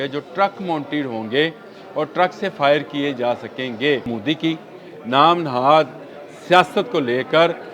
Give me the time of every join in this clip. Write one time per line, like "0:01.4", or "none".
0:04.1